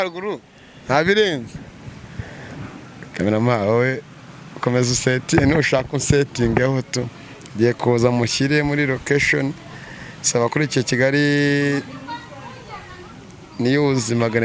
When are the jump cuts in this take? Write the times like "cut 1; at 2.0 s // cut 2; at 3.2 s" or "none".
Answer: none